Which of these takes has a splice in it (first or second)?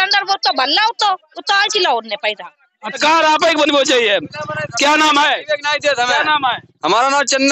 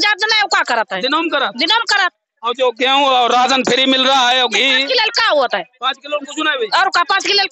first